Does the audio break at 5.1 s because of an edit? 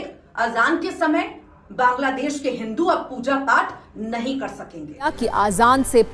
yes; 1 cut; at 5.1 s

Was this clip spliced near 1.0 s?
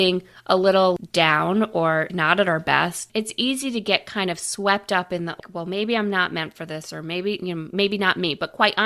yes; 4 cuts; at 1.0 s, 2.1 s, 3.0 s, 5.4 s

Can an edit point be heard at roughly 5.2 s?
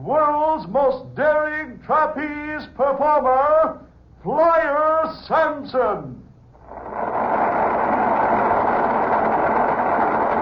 no; 1 cut; at 1.8 s

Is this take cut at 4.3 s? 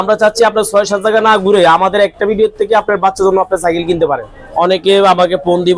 yes; 1 cut; at 4.3 s

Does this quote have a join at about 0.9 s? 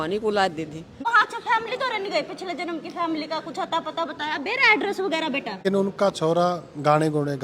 yes; 2 cuts; at 0.9 s, 5.6 s

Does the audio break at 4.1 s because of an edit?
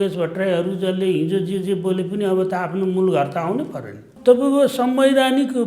yes; 1 cut; at 4.1 s

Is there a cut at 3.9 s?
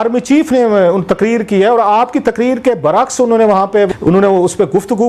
yes; 1 cut; at 3.9 s

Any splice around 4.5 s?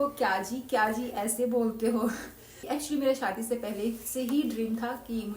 no; 1 cut; at 2.6 s

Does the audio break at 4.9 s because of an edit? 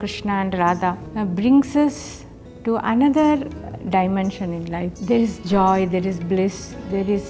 yes; 2 cuts; at 1.0 s, 4.9 s

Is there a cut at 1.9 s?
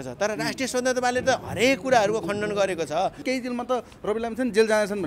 no; 1 cut; at 3.2 s

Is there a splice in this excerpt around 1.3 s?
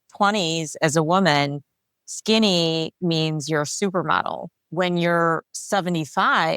no; 2 cuts; at 4.5 s, 5.5 s

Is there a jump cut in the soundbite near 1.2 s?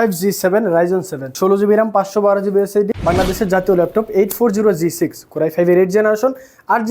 yes; 2 cuts; at 1.2 s, 2.9 s

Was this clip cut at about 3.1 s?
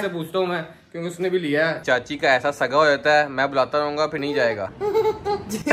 no; 2 cuts; at 1.8 s, 4.4 s

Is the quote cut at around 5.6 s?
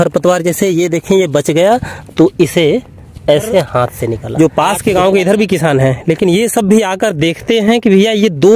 no; 1 cut; at 4.3 s

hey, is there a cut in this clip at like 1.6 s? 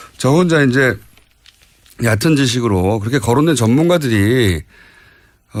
no; 0 cuts

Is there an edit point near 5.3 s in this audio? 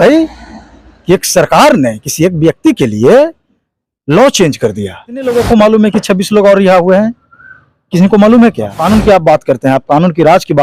yes; 2 cuts; at 5.3 s, 8.8 s

